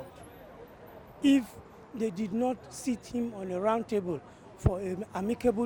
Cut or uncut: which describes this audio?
uncut